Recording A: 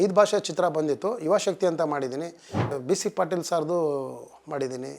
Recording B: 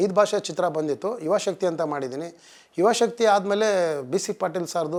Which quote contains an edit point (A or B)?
A